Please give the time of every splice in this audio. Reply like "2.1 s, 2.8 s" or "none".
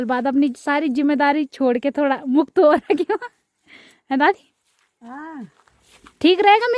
none